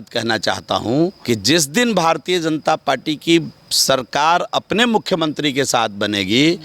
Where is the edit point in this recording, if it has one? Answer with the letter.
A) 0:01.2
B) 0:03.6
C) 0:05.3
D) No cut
A